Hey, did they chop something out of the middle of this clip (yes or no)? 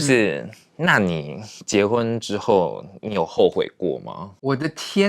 no